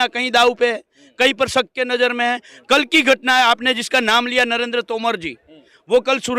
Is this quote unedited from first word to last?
yes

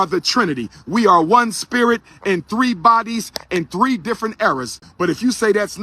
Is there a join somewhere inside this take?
yes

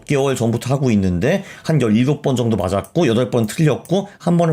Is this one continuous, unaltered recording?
yes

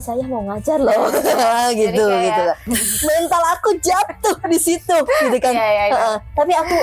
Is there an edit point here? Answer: yes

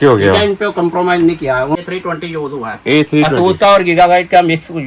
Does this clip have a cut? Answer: yes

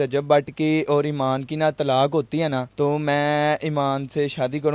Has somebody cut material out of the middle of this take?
yes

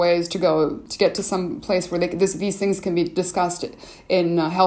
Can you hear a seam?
no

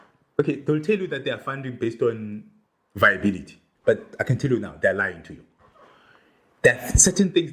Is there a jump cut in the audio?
no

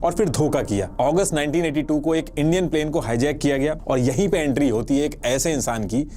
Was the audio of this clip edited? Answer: yes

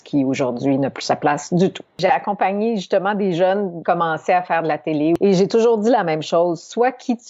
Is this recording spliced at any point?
yes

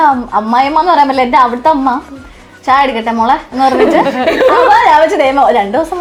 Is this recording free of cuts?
yes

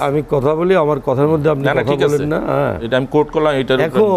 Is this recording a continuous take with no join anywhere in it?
yes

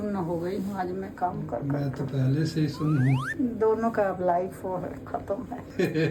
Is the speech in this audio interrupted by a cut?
no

